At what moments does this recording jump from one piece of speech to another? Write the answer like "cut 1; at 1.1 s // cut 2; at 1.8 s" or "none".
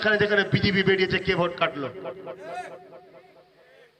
none